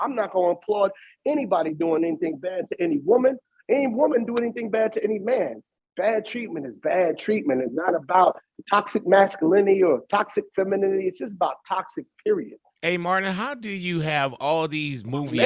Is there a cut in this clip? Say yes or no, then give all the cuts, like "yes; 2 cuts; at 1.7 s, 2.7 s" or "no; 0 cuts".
no; 0 cuts